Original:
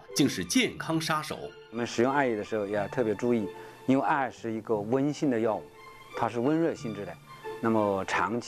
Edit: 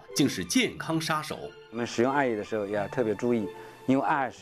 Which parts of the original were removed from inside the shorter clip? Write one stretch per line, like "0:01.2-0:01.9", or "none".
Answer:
none